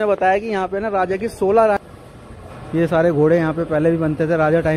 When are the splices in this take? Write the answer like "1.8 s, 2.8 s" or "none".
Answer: 1.8 s